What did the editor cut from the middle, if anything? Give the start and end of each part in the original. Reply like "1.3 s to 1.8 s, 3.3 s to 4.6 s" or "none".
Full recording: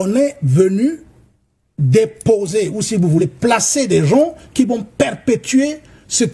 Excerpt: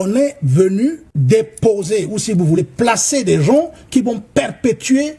1.1 s to 1.7 s